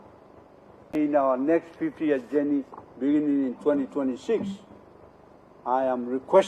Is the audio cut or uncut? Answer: cut